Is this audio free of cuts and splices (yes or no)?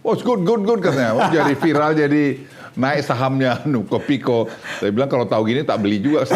yes